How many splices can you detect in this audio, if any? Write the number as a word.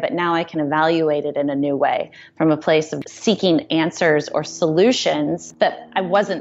two